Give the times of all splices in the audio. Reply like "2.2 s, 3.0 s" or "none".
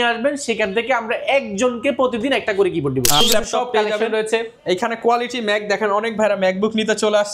3.2 s